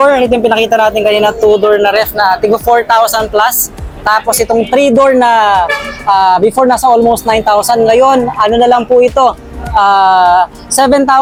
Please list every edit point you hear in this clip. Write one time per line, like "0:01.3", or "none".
none